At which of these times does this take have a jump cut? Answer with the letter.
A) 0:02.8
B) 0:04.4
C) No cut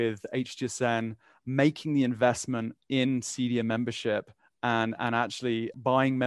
C